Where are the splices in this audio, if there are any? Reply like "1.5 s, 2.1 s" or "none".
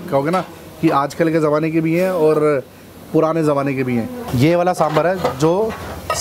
4.3 s